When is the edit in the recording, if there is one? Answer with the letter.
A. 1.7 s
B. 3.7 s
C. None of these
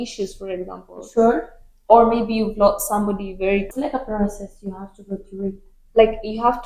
B